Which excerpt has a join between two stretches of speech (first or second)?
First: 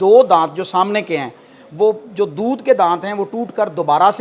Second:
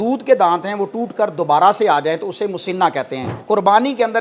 second